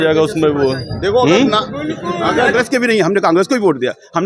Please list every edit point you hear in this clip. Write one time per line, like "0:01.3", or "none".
0:02.5

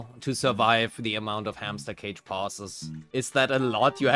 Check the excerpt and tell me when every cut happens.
0:03.1

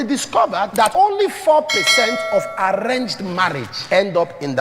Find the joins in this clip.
0:00.8
0:03.7

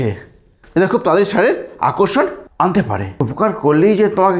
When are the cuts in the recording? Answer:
0:02.4
0:03.2

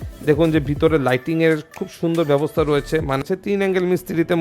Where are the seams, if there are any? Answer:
0:03.2

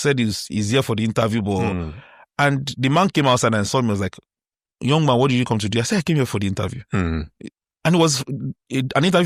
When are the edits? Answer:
none

